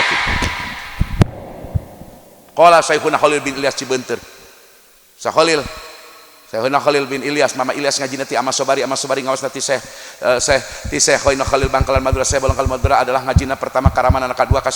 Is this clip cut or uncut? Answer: uncut